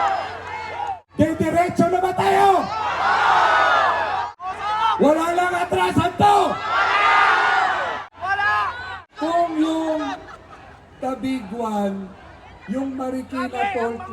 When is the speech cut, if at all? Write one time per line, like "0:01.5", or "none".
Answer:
0:01.0
0:04.3
0:08.1
0:09.1